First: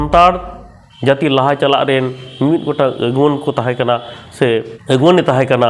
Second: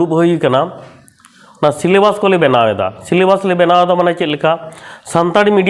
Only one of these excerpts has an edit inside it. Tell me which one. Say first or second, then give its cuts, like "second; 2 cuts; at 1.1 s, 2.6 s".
first; 1 cut; at 4.7 s